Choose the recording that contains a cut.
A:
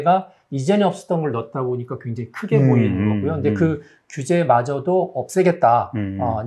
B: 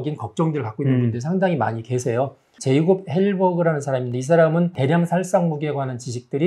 B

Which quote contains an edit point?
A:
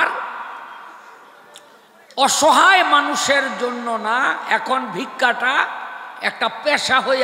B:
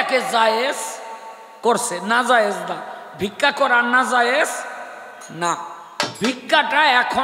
B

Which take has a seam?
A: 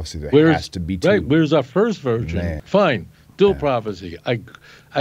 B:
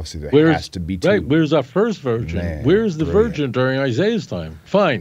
A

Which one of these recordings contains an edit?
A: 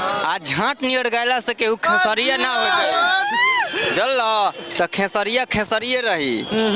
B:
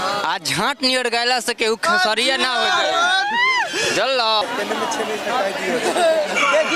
B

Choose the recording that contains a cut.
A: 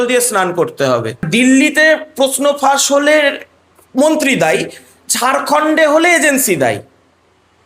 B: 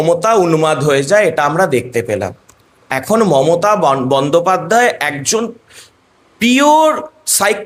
A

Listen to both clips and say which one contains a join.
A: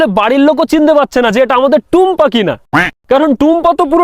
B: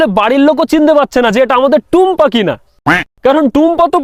A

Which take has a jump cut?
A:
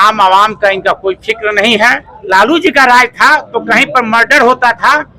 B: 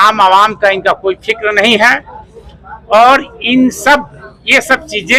A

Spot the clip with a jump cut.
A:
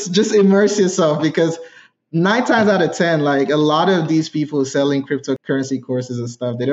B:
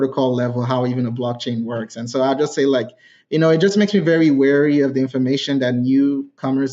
A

